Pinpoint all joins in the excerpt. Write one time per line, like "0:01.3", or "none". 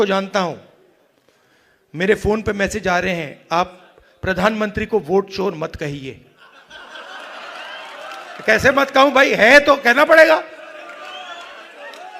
none